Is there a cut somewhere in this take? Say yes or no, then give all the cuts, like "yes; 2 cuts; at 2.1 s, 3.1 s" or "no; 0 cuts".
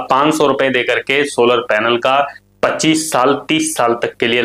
no; 0 cuts